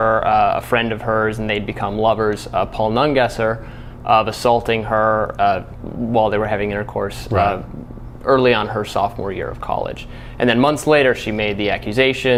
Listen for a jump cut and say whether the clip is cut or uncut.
uncut